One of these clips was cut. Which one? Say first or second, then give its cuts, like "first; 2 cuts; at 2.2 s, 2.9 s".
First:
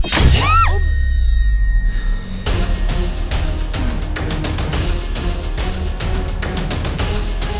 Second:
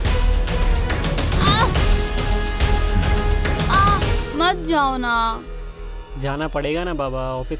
second; 1 cut; at 4.2 s